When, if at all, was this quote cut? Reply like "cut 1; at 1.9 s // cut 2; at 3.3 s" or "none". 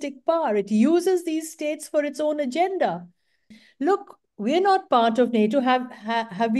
cut 1; at 3.5 s